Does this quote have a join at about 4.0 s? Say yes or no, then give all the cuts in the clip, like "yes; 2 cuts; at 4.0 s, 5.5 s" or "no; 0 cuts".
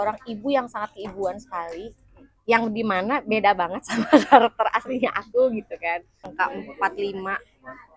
no; 1 cut; at 6.3 s